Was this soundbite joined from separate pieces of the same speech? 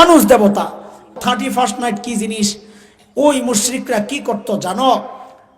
yes; 1 cut; at 1.1 s

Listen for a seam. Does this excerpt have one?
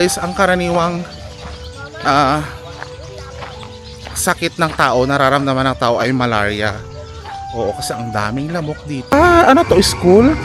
yes; 1 cut; at 9.1 s

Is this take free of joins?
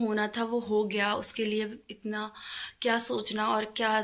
yes; 0 cuts

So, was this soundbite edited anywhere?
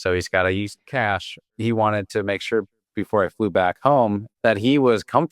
yes; 2 cuts; at 1.5 s, 4.3 s

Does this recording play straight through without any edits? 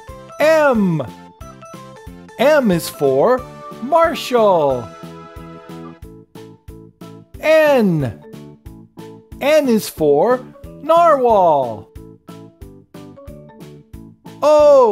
yes; 0 cuts

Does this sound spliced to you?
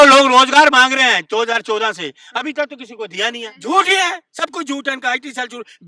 yes; 1 cut; at 3.5 s

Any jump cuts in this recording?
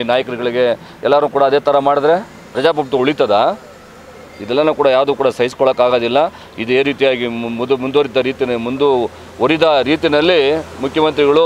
no; 0 cuts

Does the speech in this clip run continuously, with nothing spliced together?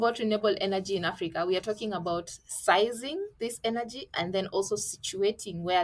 yes; 0 cuts

